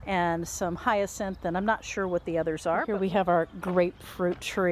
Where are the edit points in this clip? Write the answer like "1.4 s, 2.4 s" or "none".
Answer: 2.9 s

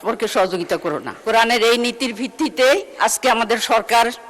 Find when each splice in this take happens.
1.2 s, 2.9 s

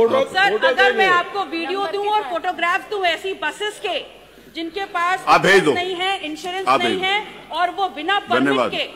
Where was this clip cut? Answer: none

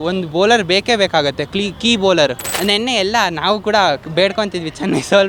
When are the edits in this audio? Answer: 2.5 s

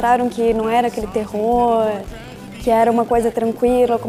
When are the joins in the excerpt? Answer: none

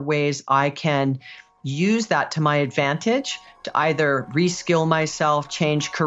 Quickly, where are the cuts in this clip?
none

